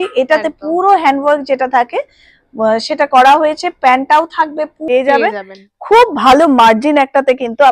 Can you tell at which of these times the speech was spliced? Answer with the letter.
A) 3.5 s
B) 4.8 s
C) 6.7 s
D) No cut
B